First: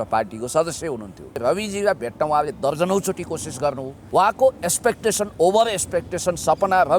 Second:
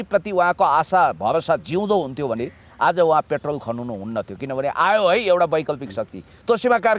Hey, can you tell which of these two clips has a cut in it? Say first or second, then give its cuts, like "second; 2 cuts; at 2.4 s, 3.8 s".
first; 2 cuts; at 1.3 s, 3.9 s